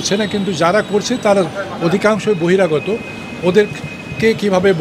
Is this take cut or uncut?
uncut